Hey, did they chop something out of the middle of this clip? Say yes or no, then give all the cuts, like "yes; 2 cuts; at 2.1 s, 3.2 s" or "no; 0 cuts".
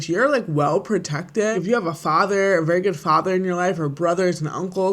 yes; 1 cut; at 1.5 s